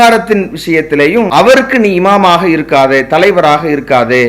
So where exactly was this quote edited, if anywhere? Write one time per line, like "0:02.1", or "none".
0:01.3